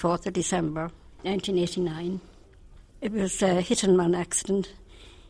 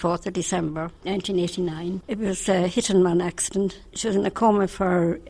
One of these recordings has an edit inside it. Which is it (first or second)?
second